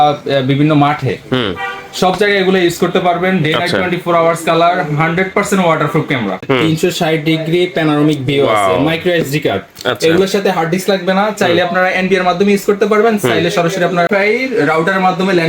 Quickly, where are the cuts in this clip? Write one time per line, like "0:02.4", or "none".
0:06.4